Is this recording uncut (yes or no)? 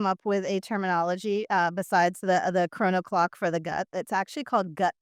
yes